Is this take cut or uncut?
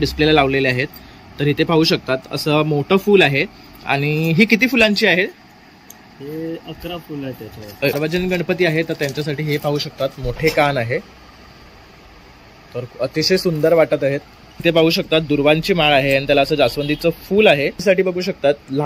cut